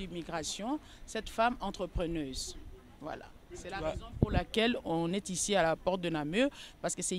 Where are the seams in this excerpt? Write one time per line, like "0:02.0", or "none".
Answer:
none